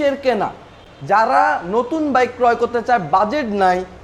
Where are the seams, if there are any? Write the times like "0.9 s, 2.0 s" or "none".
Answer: none